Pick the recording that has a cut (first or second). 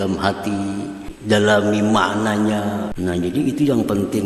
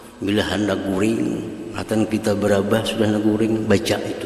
first